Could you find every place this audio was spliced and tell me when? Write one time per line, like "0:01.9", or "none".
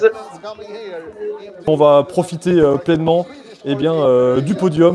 0:01.5